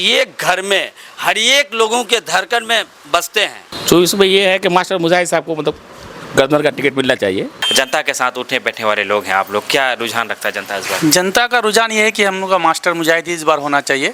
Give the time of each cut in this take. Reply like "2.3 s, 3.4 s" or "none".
3.7 s, 7.6 s